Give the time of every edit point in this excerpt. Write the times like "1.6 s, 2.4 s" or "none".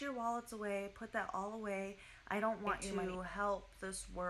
2.9 s